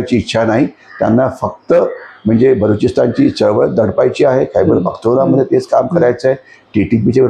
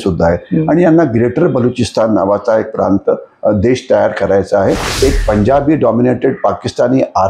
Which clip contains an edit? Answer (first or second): second